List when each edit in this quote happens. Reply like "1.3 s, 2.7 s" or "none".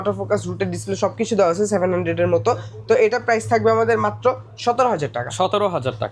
none

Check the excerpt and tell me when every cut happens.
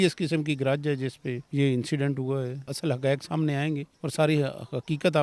1.4 s, 2.7 s, 3.9 s

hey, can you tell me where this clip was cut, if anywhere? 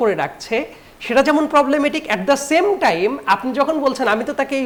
none

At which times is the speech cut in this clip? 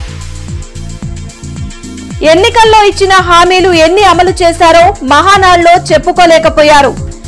1.0 s

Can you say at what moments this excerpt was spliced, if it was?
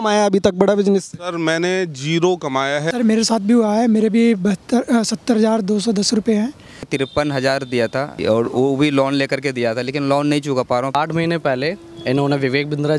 2.9 s, 6.9 s, 8.2 s, 10.9 s

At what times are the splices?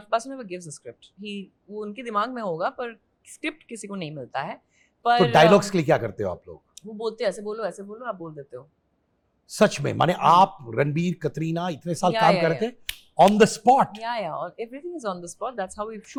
none

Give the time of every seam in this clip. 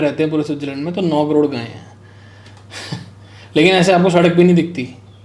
none

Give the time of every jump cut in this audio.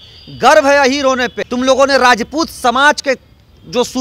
1.4 s

